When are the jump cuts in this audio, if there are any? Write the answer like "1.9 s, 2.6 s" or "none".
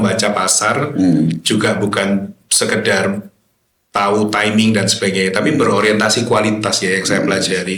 none